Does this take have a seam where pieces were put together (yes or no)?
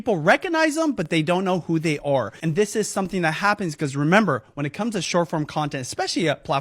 no